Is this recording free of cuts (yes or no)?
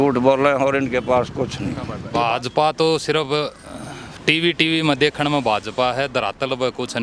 no